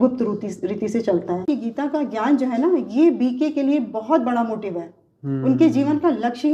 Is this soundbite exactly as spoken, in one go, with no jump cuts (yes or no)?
no